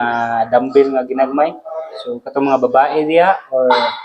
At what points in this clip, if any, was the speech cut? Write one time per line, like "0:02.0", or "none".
none